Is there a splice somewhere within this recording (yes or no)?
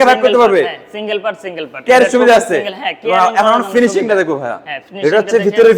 no